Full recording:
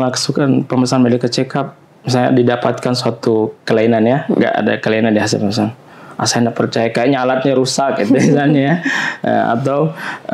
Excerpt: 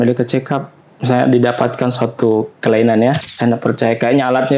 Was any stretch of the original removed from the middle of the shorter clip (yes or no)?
yes